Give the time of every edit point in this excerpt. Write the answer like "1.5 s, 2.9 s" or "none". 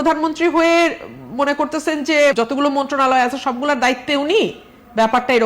2.3 s